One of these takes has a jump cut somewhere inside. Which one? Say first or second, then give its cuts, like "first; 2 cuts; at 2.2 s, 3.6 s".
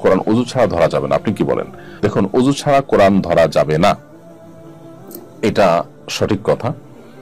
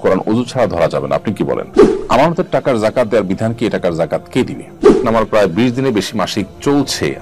second; 2 cuts; at 2.0 s, 5.0 s